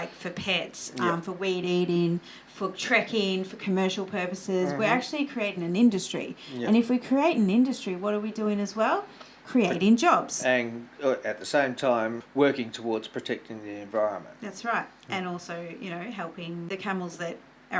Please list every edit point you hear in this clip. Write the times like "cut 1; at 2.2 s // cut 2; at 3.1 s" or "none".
cut 1; at 12.2 s // cut 2; at 16.7 s